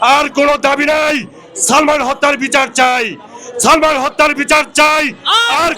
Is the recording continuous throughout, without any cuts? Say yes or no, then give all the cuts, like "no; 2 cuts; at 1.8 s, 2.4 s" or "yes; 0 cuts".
yes; 0 cuts